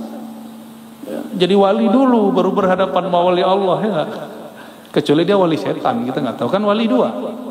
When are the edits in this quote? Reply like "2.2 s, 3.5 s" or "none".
none